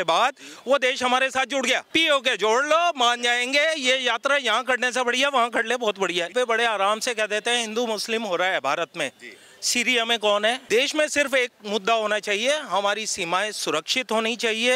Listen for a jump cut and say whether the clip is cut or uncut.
cut